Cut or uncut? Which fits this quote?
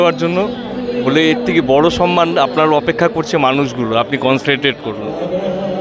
uncut